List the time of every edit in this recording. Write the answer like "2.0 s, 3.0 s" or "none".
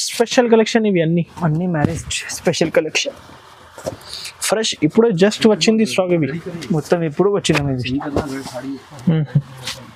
none